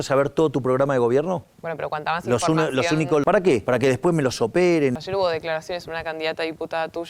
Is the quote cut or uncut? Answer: cut